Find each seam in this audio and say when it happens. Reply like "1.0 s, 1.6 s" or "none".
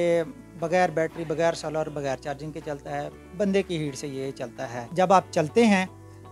4.8 s